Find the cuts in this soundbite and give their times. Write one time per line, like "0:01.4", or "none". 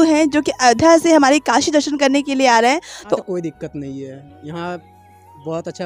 0:03.2